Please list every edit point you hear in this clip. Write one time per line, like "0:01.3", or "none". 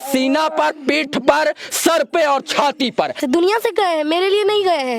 0:03.2